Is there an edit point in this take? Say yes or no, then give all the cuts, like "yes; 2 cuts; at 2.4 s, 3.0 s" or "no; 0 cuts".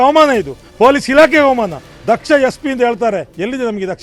no; 0 cuts